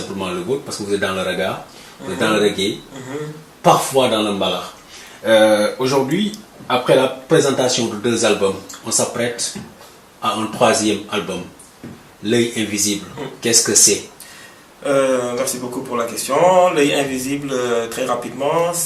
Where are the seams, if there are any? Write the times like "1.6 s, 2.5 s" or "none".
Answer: none